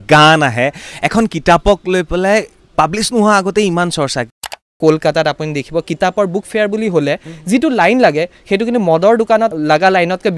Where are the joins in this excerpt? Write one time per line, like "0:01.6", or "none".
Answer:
0:04.8
0:09.5